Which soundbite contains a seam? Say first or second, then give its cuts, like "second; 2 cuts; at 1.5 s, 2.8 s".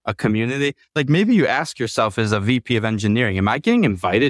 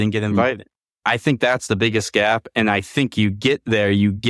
second; 1 cut; at 1.0 s